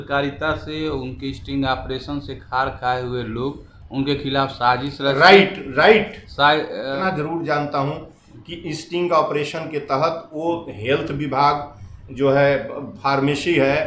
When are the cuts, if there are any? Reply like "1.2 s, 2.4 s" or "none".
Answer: 6.9 s